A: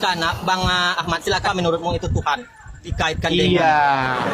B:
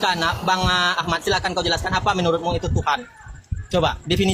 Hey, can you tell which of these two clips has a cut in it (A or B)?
A